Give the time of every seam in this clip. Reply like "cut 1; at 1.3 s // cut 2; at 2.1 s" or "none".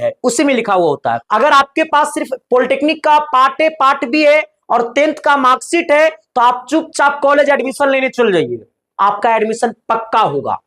cut 1; at 1.2 s